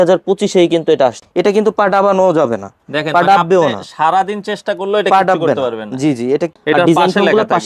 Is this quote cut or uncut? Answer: cut